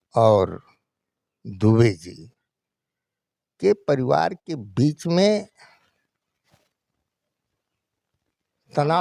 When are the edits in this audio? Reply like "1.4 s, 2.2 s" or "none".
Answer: none